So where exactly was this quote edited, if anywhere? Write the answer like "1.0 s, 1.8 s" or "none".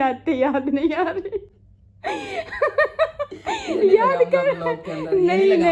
none